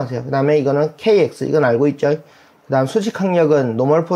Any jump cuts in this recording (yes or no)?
no